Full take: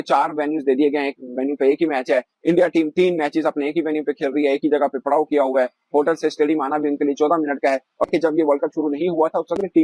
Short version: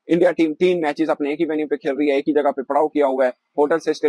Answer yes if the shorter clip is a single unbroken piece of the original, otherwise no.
yes